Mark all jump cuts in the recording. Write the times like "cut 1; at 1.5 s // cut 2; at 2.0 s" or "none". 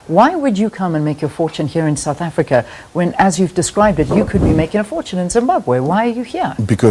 none